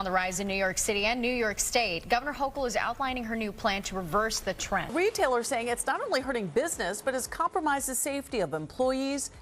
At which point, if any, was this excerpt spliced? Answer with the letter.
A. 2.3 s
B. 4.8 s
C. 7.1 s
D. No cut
B